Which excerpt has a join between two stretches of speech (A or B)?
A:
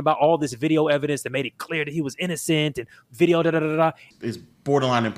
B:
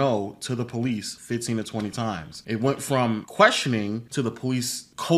A